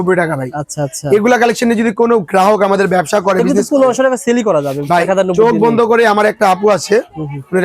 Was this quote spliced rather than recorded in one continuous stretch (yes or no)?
no